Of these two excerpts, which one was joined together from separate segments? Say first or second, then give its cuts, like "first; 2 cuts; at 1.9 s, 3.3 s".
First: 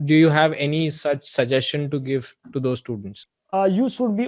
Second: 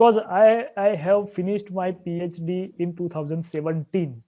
first; 1 cut; at 3.2 s